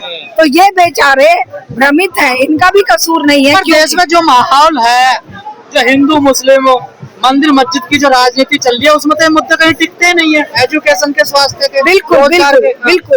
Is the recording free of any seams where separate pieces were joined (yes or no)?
yes